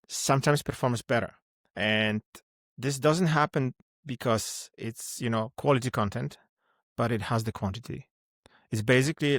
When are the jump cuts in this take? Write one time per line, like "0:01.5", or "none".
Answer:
none